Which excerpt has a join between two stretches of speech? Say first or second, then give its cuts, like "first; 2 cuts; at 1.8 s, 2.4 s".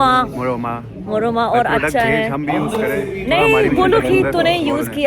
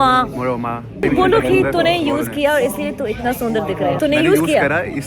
second; 2 cuts; at 1.0 s, 4.0 s